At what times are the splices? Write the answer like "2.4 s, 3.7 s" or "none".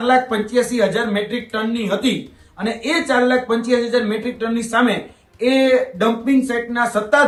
none